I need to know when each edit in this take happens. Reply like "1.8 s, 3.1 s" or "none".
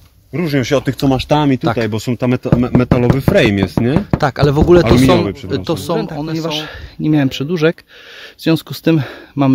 6.3 s